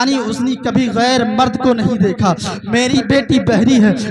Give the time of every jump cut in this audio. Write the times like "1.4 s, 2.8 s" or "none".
2.9 s